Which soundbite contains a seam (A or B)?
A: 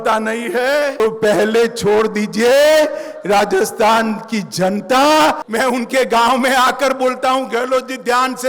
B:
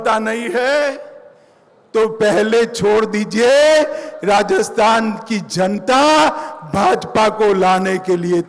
A